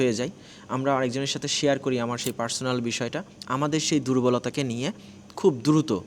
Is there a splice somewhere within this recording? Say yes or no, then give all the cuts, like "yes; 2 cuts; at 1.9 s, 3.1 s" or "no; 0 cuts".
yes; 1 cut; at 3.3 s